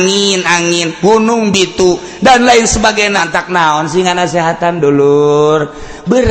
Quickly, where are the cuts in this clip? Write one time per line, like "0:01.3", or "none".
0:03.2